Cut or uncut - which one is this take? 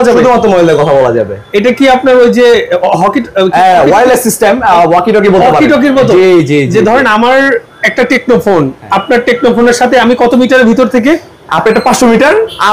uncut